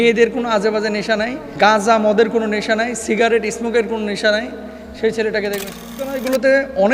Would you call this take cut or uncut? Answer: cut